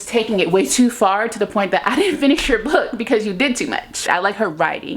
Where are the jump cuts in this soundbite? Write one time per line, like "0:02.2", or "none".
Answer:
0:04.1